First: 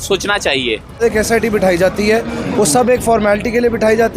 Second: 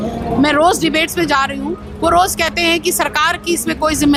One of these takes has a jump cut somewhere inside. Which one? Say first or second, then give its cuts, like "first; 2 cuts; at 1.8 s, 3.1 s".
first; 1 cut; at 1.0 s